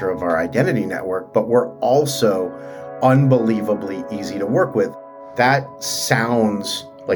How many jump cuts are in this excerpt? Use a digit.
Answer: 1